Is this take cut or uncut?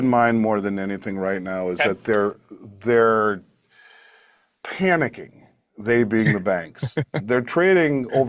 uncut